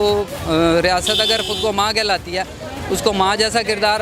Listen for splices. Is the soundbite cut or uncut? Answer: uncut